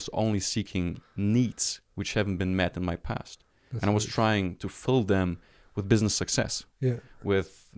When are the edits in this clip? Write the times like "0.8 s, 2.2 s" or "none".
none